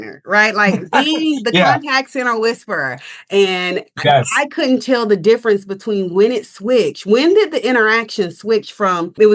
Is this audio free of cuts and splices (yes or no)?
yes